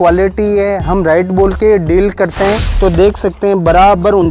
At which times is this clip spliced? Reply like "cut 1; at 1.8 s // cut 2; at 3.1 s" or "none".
cut 1; at 2.7 s